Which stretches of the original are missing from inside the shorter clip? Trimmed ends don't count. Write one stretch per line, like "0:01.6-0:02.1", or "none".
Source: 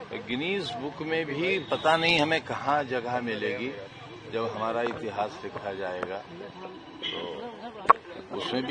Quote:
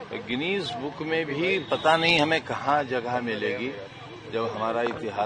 none